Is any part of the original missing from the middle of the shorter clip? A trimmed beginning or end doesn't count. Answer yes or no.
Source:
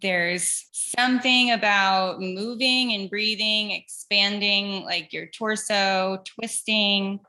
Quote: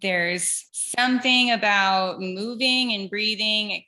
no